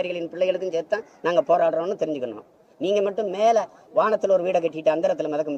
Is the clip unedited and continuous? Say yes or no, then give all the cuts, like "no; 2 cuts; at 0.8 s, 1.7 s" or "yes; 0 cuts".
yes; 0 cuts